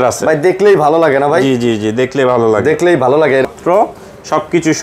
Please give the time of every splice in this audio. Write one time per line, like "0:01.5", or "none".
0:03.5